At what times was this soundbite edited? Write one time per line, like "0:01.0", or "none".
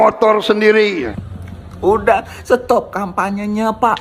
0:01.1